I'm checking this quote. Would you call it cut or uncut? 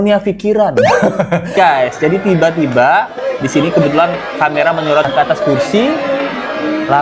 cut